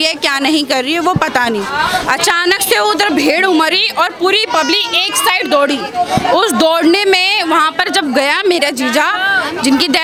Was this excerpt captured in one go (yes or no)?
yes